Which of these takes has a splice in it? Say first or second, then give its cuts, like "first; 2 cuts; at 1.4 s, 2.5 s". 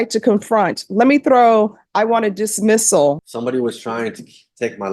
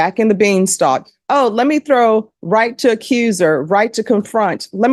first; 1 cut; at 3.2 s